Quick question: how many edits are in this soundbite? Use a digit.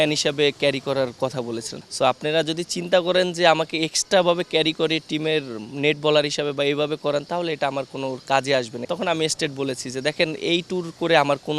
2